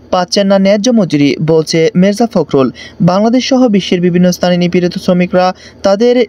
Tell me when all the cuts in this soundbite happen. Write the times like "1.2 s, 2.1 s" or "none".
none